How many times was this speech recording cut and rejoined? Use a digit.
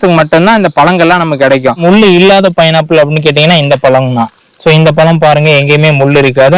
1